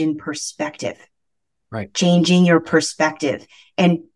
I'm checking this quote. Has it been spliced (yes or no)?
no